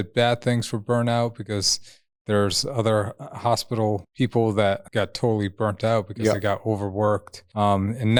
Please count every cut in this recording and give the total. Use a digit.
0